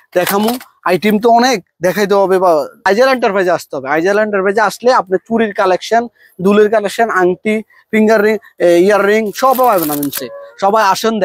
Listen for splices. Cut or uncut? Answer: cut